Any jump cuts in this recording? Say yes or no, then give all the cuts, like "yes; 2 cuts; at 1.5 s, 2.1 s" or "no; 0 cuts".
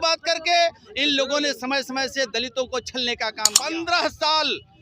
yes; 1 cut; at 3.5 s